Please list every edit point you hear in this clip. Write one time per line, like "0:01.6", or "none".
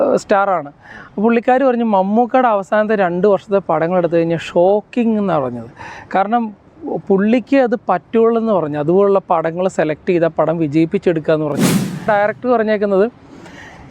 0:12.1